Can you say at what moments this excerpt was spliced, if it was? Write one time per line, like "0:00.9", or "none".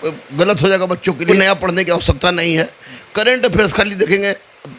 0:01.3

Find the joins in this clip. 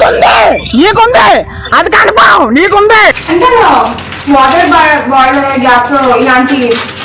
none

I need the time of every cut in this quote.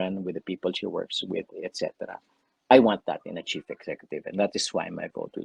none

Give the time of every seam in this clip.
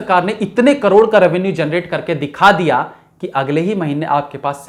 none

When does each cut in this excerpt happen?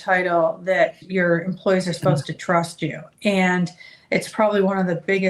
0:01.0

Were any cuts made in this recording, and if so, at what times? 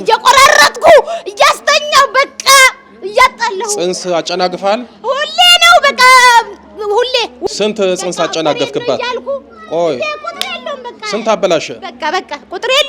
0:07.4

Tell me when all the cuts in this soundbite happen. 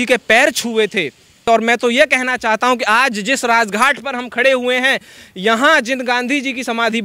0:01.5

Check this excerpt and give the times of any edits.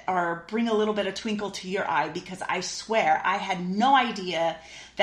none

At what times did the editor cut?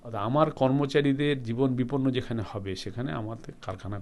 none

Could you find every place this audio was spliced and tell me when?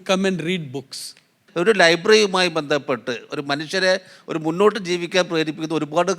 0:01.4

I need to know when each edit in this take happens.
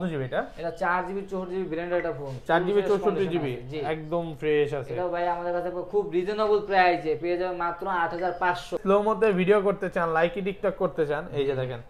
0:08.8

